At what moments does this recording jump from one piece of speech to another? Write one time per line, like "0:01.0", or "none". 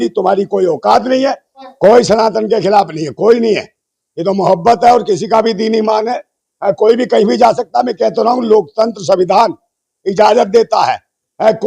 0:01.5